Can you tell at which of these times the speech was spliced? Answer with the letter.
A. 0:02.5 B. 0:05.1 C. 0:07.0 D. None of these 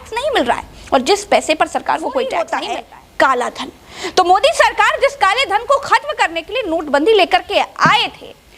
A